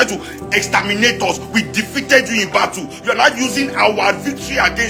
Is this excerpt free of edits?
yes; 0 cuts

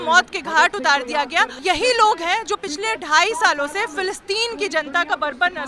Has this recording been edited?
yes; 1 cut; at 1.5 s

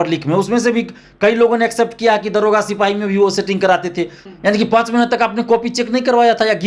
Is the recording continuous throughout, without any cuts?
no; 1 cut; at 4.2 s

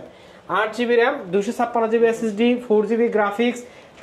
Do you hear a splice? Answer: no; 0 cuts

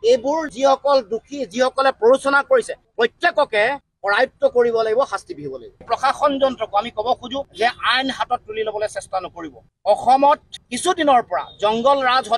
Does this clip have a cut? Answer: yes; 1 cut; at 5.8 s

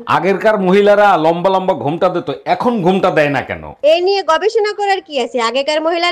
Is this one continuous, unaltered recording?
yes; 0 cuts

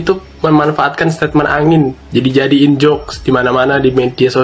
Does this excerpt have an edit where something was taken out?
no; 0 cuts

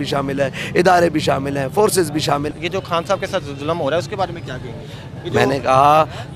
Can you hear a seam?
yes; 1 cut; at 2.5 s

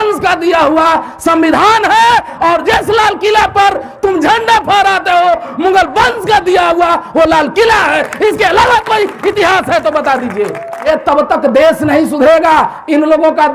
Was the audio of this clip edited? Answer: yes; 1 cut; at 10.9 s

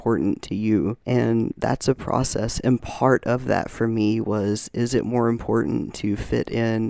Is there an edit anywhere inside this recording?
yes; 1 cut; at 1.0 s

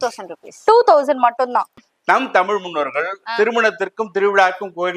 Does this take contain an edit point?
yes; 1 cut; at 1.8 s

